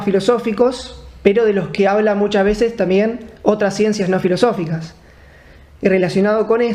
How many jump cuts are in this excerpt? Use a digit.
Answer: 1